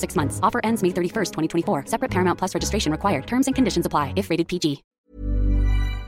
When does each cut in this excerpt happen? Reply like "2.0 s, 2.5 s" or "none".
4.9 s